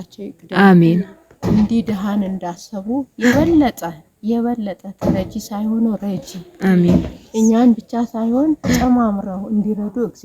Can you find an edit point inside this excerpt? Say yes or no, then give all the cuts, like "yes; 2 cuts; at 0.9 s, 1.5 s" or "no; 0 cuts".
no; 0 cuts